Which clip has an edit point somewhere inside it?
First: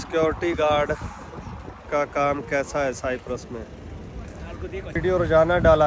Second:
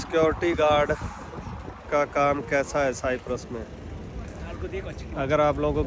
first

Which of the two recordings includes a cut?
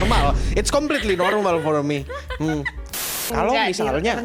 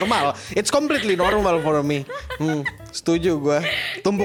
first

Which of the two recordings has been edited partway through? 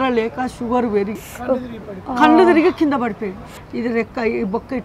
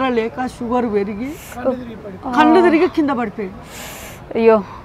first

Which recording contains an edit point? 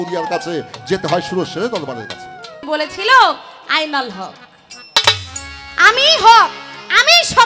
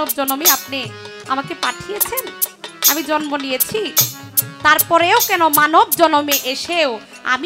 first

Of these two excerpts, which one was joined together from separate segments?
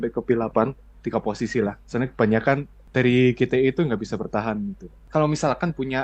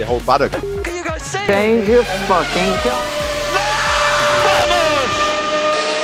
first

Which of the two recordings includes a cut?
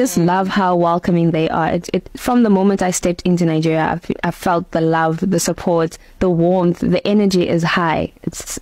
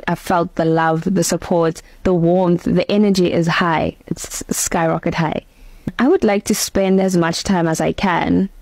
second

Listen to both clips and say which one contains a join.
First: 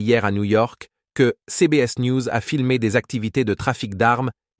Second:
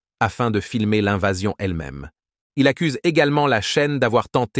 second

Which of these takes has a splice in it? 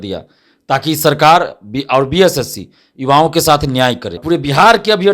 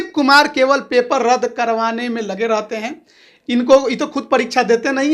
first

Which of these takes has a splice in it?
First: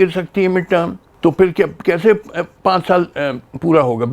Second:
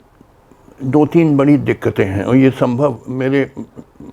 first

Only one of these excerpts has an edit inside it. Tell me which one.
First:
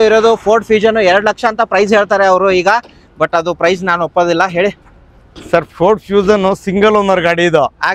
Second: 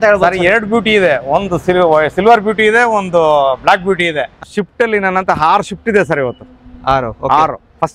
second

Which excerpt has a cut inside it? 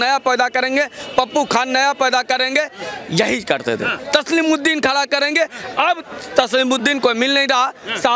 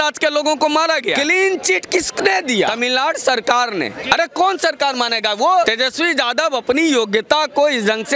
second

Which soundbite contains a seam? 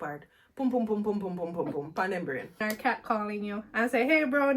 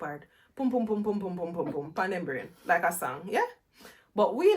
first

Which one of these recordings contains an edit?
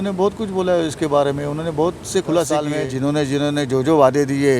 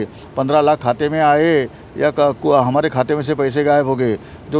first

